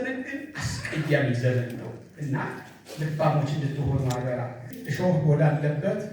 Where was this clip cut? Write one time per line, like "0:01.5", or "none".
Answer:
0:04.7